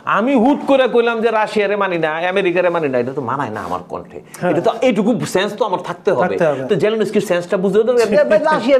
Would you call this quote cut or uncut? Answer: uncut